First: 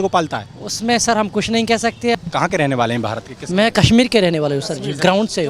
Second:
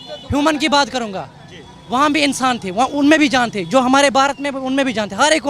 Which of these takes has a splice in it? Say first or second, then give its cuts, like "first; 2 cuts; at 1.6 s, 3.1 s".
first; 1 cut; at 2.1 s